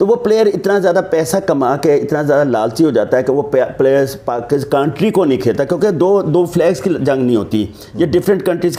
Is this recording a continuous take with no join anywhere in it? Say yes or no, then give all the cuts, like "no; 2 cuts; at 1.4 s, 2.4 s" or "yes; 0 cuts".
yes; 0 cuts